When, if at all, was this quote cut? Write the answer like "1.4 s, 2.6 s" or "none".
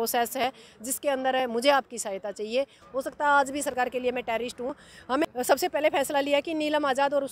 2.8 s, 5.2 s